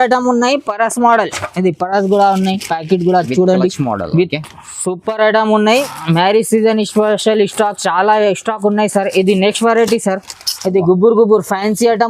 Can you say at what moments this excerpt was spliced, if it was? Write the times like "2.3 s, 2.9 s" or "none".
5.8 s